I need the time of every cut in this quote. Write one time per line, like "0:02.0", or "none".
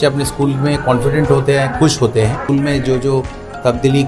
0:02.4